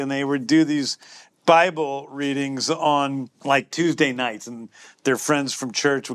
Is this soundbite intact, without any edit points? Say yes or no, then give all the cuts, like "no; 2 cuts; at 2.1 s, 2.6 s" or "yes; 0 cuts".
yes; 0 cuts